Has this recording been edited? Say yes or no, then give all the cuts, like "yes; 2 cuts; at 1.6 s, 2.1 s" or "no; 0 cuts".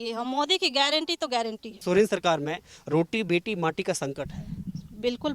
yes; 1 cut; at 1.8 s